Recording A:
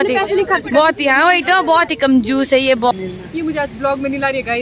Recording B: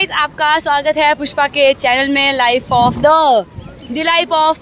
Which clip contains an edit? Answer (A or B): A